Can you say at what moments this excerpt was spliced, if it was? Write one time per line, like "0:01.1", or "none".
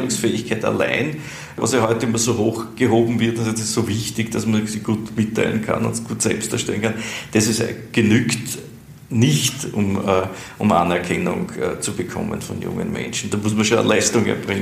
0:01.6
0:02.7